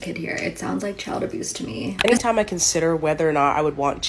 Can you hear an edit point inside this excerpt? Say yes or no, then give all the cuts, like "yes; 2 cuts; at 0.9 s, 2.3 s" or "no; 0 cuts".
yes; 1 cut; at 2.0 s